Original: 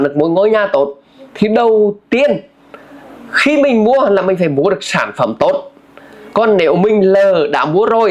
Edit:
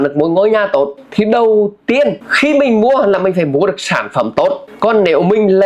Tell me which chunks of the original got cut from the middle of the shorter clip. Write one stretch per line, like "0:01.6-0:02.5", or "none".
0:01.0-0:01.2
0:02.5-0:03.3
0:05.7-0:06.2